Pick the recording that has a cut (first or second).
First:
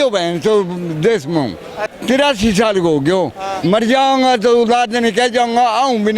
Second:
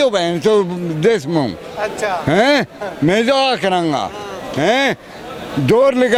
first